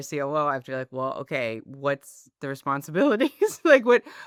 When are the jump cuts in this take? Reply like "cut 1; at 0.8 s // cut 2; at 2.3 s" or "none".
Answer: none